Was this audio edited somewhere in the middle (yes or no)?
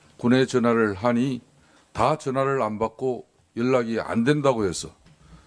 yes